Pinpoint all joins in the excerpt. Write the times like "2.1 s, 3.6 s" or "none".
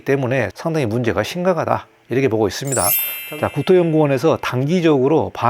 none